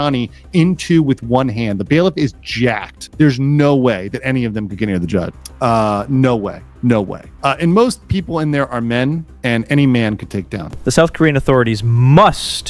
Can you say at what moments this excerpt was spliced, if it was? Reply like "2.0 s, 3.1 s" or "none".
none